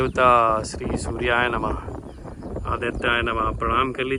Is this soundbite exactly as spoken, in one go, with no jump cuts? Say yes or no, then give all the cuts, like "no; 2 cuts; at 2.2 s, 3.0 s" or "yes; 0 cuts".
yes; 0 cuts